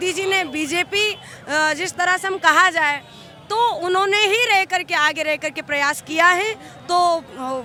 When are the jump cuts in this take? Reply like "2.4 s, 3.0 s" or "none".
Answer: none